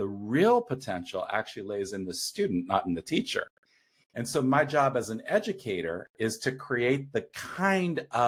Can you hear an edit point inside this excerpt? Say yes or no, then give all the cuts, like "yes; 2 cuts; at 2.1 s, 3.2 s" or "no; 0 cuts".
no; 0 cuts